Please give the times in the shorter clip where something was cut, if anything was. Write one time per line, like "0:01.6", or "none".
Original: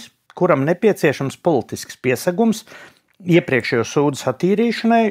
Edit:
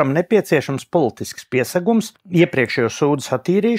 0:02.2